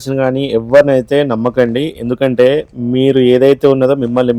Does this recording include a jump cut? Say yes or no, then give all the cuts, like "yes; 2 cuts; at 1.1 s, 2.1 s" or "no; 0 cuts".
no; 0 cuts